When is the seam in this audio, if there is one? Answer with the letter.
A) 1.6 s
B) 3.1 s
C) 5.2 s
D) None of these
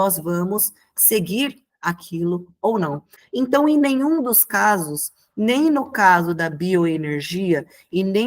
B